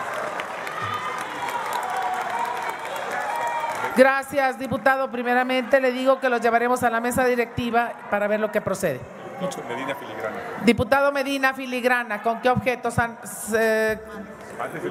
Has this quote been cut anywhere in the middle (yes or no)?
no